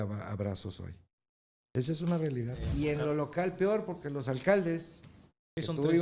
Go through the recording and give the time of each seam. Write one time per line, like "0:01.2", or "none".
0:02.6